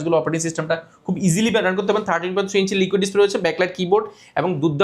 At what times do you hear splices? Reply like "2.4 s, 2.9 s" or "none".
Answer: none